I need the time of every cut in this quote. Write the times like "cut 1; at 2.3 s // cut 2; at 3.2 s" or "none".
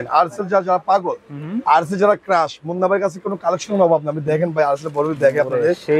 none